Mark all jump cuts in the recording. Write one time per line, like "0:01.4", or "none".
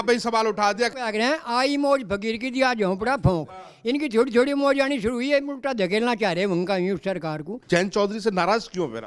0:00.9
0:07.6